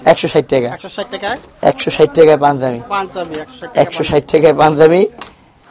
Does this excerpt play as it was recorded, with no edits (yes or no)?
yes